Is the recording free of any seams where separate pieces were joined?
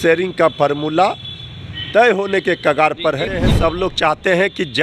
no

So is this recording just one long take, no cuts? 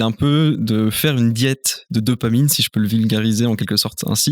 yes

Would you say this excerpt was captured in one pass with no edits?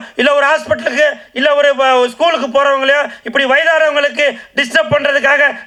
yes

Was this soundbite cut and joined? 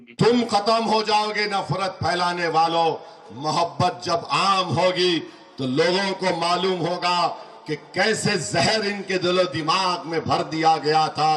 no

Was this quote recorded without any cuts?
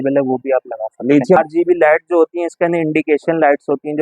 no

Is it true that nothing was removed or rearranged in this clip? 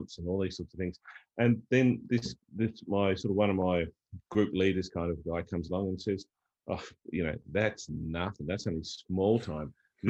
yes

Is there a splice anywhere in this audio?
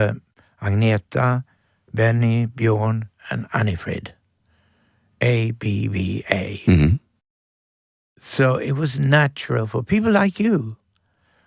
no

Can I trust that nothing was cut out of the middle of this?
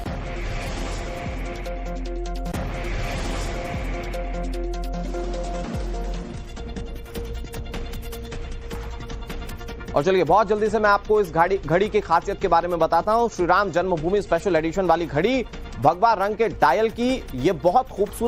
no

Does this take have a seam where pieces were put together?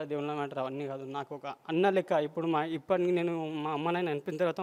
no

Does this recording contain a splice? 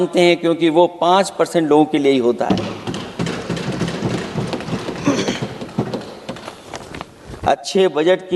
no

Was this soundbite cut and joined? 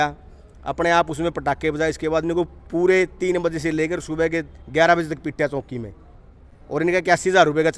no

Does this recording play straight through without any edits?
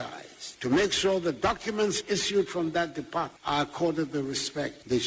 yes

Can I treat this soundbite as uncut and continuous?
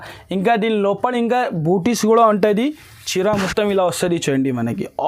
yes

